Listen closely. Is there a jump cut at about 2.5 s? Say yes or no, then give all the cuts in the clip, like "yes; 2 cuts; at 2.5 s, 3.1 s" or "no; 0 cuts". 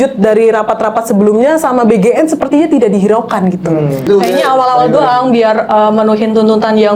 no; 1 cut; at 4.0 s